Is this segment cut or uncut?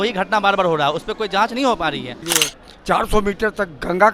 cut